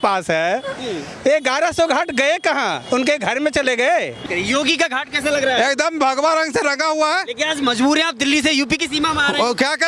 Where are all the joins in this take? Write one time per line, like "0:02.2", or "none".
0:04.3

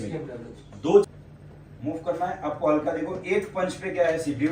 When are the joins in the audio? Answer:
0:01.1

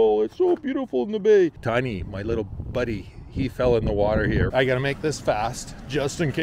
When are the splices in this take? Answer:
0:01.6
0:04.5

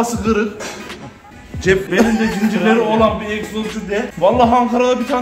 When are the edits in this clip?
none

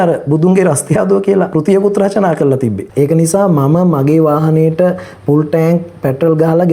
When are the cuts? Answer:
0:01.5
0:02.8

